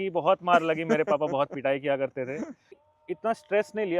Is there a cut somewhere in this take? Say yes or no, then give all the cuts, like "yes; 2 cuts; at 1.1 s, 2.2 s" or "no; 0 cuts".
yes; 1 cut; at 2.7 s